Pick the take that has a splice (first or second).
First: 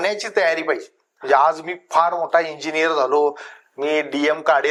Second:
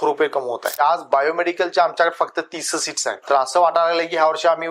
second